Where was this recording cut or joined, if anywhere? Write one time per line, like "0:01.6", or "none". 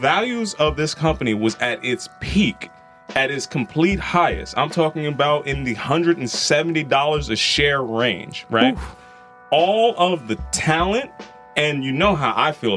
none